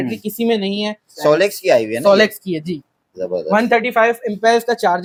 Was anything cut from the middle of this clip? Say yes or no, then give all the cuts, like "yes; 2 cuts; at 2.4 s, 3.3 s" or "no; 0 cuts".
no; 0 cuts